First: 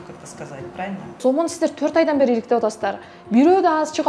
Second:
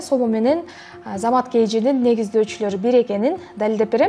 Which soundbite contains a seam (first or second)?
first